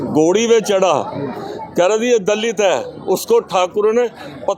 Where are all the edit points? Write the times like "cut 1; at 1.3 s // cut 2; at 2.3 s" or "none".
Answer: none